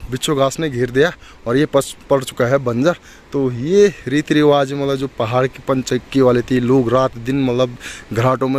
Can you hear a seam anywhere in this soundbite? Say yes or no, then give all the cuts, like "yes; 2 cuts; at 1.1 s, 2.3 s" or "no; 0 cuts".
no; 0 cuts